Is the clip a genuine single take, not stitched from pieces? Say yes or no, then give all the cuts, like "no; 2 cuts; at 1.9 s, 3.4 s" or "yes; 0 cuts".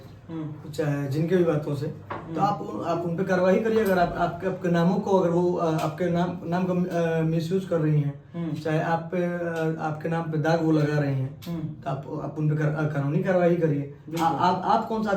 yes; 0 cuts